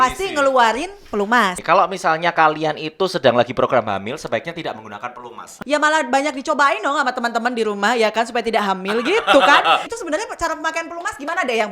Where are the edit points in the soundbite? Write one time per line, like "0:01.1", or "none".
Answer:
0:01.6
0:05.6
0:09.9